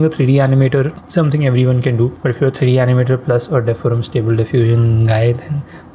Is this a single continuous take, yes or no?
yes